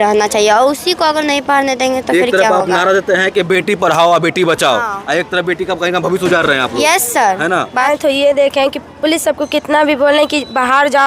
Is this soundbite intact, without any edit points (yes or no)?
no